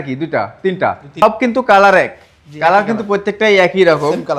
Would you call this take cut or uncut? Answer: cut